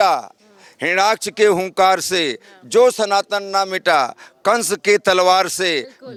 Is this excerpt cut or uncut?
uncut